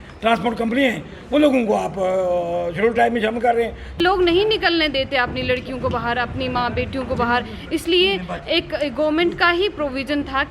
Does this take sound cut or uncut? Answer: cut